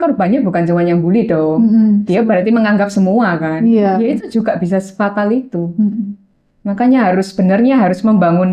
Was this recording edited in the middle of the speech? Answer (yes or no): no